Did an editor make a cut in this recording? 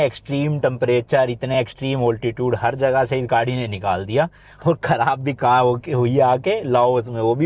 no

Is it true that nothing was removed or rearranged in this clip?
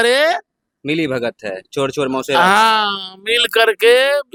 yes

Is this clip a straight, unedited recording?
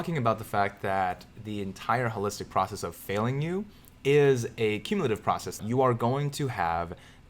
no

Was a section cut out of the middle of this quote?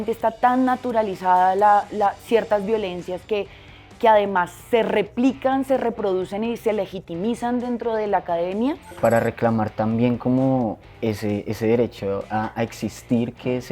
yes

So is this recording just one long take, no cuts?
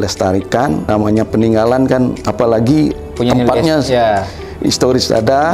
no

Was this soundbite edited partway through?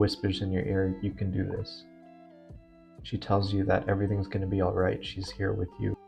no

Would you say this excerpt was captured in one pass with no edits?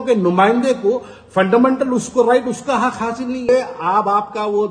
no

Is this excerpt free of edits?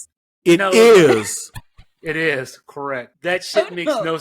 no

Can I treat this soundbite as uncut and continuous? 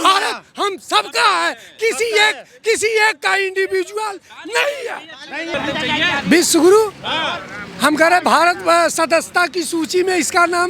no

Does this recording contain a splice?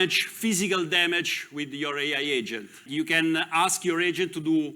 yes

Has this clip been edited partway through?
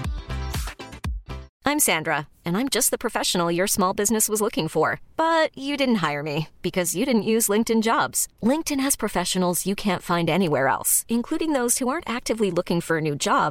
yes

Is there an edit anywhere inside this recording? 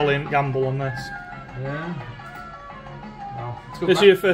no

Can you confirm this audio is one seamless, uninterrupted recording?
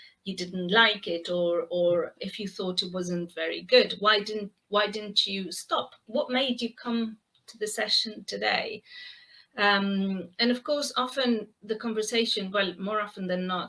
no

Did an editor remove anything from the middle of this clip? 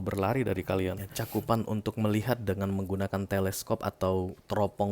yes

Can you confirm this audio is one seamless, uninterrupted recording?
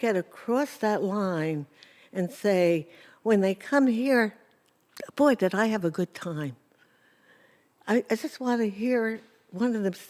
yes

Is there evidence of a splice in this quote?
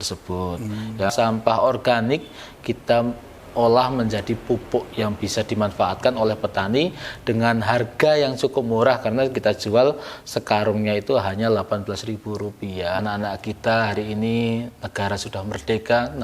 yes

